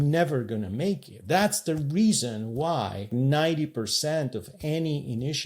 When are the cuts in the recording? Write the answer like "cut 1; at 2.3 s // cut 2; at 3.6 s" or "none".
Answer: cut 1; at 1.1 s // cut 2; at 3.1 s